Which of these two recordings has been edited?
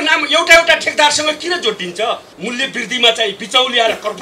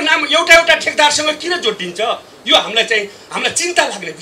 first; 1 cut; at 2.3 s

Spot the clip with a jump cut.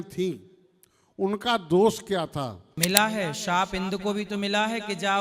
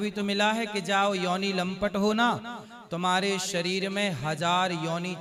first; 1 cut; at 2.7 s

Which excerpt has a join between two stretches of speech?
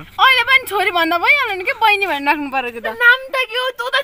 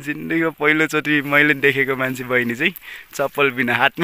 first; 1 cut; at 3.0 s

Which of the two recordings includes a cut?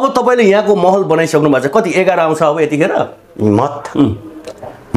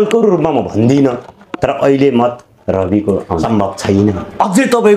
second; 1 cut; at 3.4 s

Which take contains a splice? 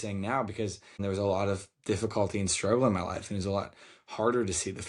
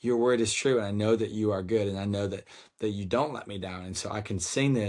first; 1 cut; at 1.0 s

